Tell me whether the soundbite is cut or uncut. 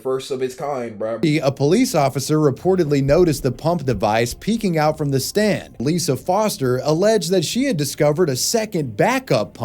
cut